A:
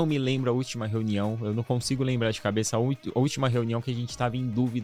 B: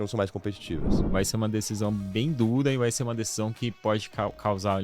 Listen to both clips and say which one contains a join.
B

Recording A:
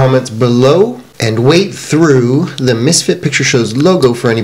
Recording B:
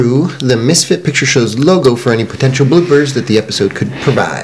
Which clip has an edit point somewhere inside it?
A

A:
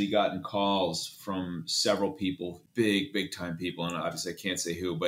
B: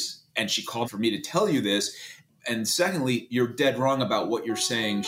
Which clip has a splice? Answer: A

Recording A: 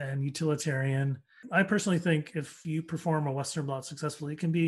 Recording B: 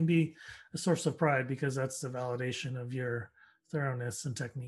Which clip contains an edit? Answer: A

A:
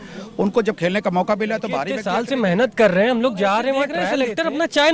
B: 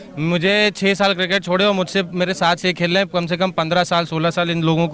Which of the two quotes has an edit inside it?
A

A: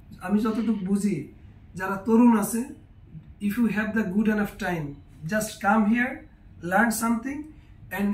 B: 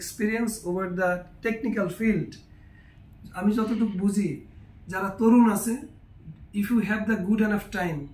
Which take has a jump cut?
A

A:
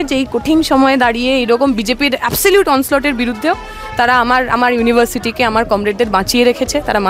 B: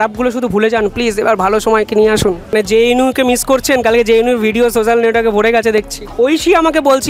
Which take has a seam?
B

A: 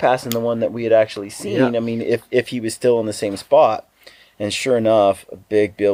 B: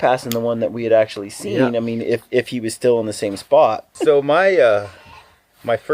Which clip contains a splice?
B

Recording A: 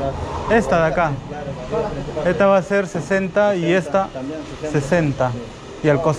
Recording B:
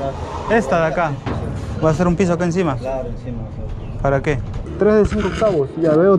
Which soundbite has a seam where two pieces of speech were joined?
B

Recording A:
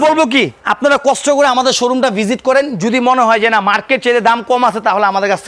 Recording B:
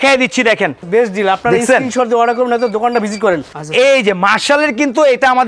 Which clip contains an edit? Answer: B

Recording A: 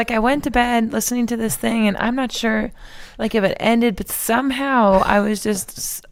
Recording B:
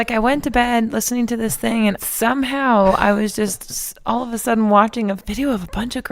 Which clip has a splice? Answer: B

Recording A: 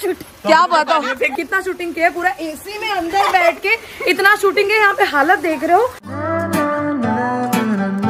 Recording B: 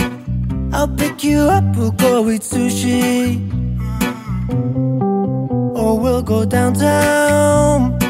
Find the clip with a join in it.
A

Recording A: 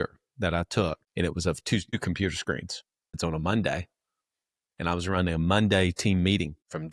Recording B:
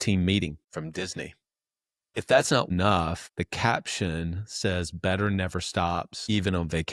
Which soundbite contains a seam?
A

